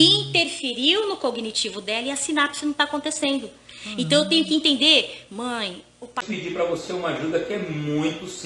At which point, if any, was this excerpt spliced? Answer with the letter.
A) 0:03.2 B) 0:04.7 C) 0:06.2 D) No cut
C